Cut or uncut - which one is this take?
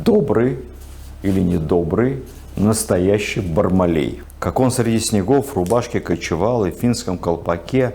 cut